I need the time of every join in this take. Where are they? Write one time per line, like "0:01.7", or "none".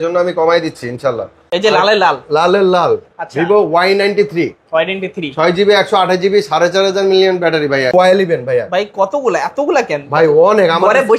0:01.5
0:07.9